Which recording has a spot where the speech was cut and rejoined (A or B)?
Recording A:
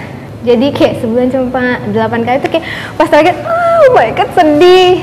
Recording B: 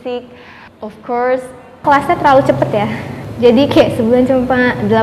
B